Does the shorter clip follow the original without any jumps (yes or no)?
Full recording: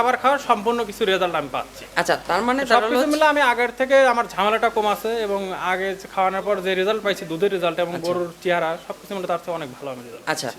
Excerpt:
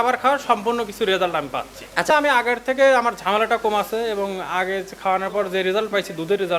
no